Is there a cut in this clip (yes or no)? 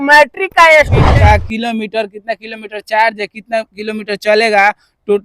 yes